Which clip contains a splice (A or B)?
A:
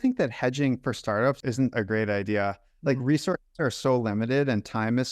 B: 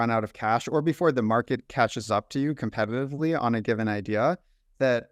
A